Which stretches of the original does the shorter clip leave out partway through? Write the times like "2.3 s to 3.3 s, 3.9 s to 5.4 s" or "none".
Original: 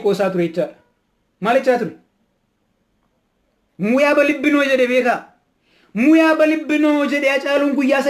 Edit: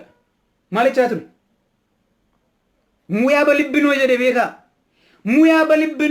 none